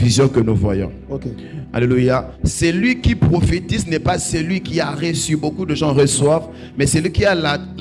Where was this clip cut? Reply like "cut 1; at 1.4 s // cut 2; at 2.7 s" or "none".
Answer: none